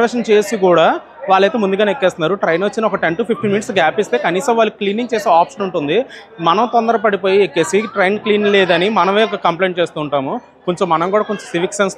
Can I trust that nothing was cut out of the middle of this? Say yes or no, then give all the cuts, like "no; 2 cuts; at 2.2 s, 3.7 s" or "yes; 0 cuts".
yes; 0 cuts